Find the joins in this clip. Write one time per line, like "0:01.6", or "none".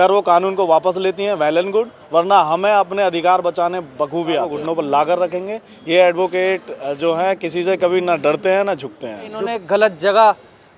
0:04.5
0:09.4